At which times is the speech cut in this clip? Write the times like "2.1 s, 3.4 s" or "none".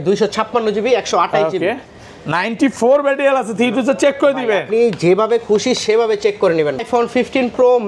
6.8 s